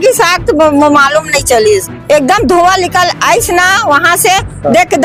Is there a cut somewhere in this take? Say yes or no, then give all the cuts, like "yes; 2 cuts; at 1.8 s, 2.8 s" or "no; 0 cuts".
no; 0 cuts